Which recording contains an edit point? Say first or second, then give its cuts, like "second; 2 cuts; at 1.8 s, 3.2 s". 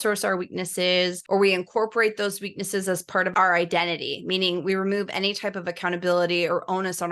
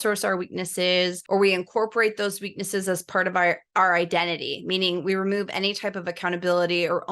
first; 1 cut; at 3.3 s